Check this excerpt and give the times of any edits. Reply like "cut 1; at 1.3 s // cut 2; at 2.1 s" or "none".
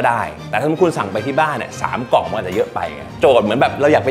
cut 1; at 3.1 s